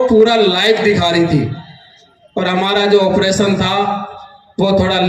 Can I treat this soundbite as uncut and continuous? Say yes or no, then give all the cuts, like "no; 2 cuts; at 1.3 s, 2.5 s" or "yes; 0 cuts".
yes; 0 cuts